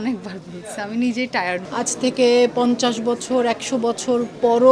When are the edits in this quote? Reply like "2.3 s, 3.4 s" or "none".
1.6 s